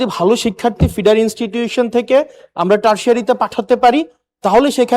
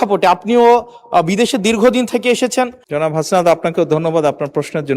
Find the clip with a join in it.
second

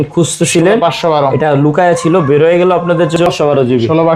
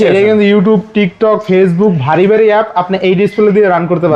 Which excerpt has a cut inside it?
first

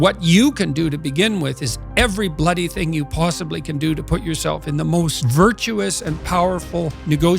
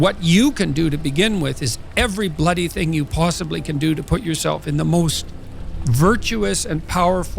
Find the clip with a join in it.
first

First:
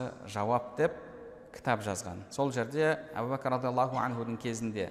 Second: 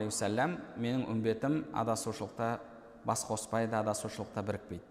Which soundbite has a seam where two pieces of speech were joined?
first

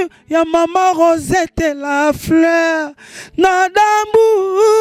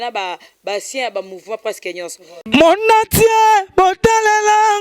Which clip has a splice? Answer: second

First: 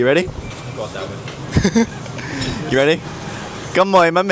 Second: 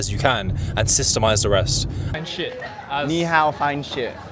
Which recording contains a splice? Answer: second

